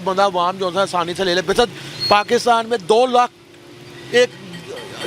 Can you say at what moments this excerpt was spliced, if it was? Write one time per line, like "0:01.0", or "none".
none